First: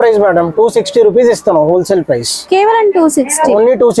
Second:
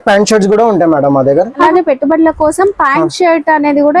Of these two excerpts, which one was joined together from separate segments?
second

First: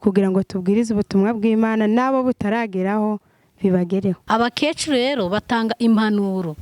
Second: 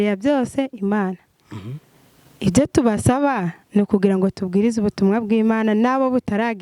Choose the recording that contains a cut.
first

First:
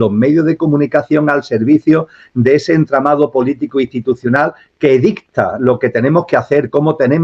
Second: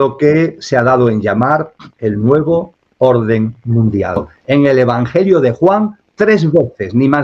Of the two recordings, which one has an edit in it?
second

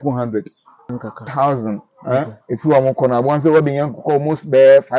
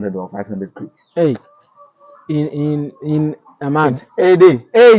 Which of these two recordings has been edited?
first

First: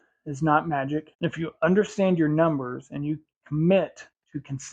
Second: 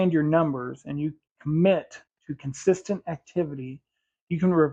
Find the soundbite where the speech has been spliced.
first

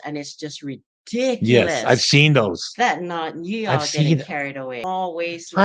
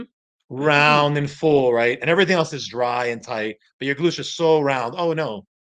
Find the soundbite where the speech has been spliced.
first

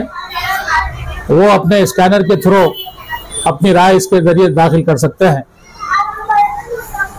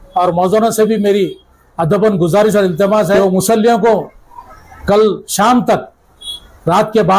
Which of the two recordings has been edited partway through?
second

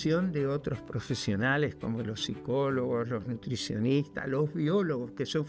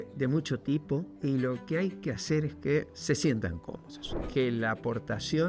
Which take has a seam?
second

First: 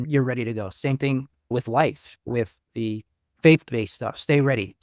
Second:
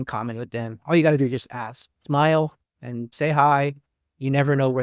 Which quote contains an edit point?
first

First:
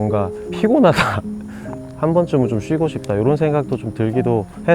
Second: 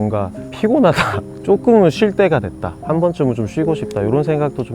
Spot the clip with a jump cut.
first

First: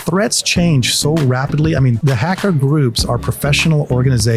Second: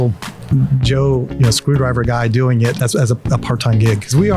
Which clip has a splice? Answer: first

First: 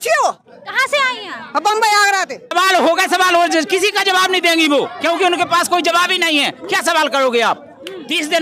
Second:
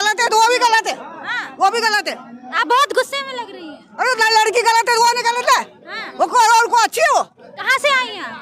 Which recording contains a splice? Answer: first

